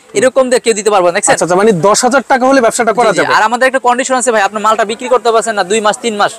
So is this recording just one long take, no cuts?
no; 1 cut; at 1.3 s

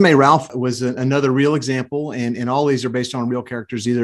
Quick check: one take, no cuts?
yes; 0 cuts

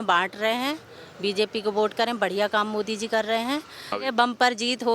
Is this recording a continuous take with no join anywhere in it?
no; 1 cut; at 4.0 s

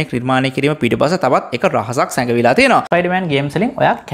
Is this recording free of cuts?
no; 1 cut; at 2.9 s

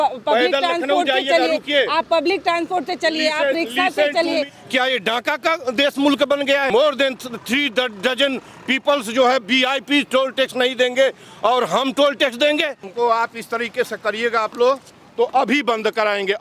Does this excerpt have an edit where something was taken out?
yes; 3 cuts; at 4.6 s, 6.7 s, 12.9 s

